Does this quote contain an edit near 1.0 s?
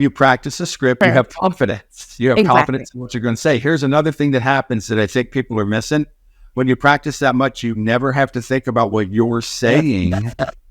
yes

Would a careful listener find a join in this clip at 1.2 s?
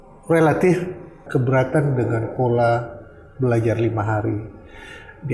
yes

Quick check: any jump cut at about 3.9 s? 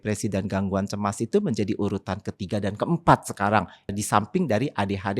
yes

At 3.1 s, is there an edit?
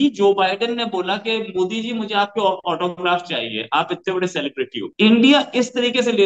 no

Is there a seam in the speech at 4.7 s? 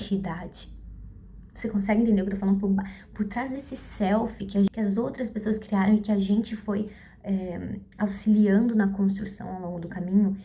yes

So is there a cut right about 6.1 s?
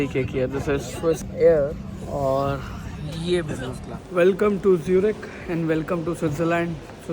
no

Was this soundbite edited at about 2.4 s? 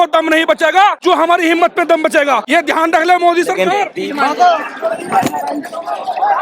yes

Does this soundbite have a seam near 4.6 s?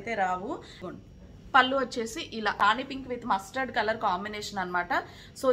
no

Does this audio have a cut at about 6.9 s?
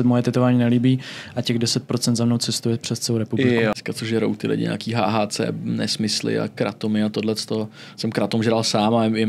no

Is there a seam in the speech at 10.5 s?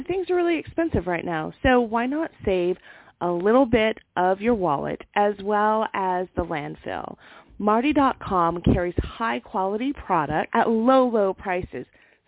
yes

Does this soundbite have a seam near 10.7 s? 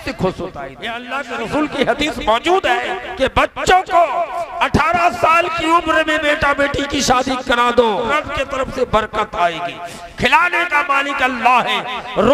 no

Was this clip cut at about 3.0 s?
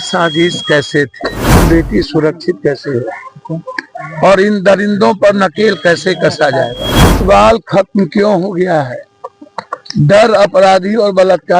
no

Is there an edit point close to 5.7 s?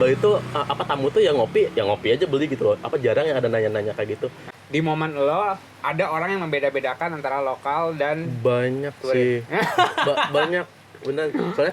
no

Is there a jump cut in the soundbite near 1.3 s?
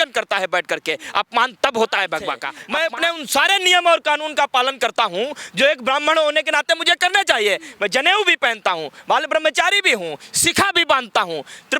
no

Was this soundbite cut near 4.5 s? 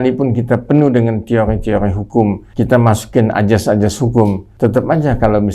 yes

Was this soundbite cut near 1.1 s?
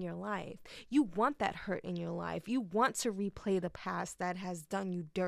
no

